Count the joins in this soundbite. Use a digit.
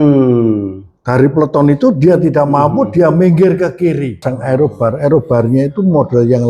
1